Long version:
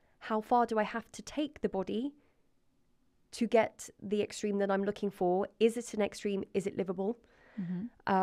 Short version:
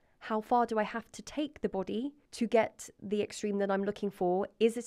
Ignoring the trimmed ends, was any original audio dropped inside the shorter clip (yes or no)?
yes